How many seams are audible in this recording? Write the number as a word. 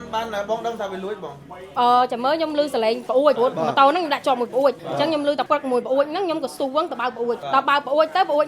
three